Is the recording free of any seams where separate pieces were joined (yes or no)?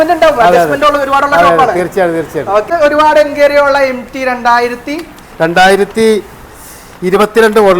no